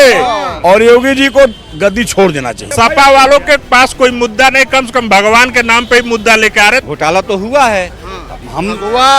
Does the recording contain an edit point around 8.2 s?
no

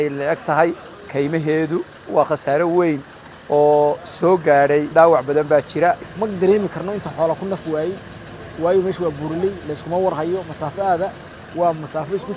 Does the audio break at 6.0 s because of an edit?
yes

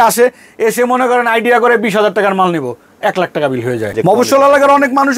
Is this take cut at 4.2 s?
yes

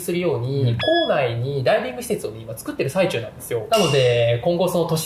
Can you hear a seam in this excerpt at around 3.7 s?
yes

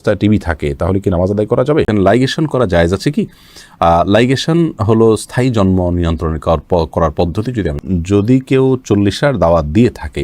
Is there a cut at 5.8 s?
no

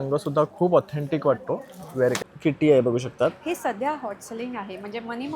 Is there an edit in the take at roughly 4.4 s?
no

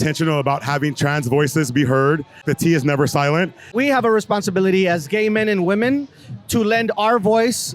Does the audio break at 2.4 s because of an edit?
yes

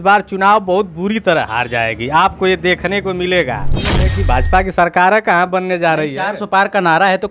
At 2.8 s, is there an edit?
no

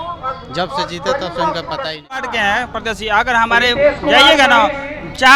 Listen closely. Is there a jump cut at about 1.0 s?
no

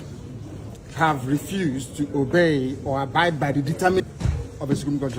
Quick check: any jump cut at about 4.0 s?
yes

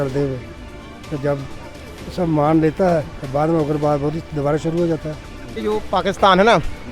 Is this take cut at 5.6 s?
yes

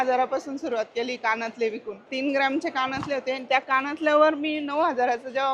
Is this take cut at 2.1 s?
yes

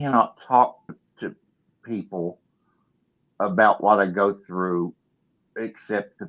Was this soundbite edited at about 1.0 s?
yes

